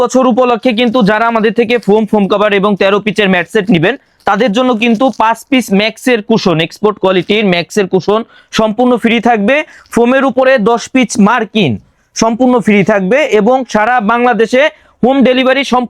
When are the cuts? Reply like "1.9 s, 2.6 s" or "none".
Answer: none